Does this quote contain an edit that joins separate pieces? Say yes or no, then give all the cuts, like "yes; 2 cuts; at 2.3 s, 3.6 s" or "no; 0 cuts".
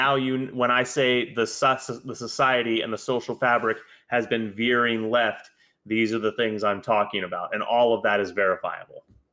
no; 0 cuts